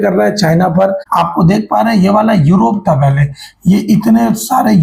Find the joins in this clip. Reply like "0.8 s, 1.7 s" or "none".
1.0 s